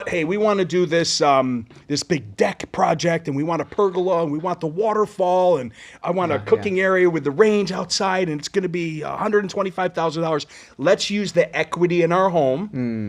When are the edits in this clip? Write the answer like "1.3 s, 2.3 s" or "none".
none